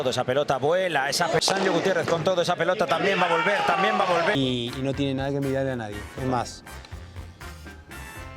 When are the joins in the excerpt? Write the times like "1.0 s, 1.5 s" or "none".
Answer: 4.4 s